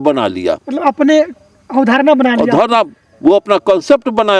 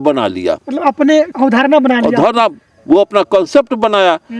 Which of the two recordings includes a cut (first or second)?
second